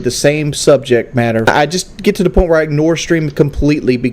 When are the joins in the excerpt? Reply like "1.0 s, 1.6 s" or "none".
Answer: 1.5 s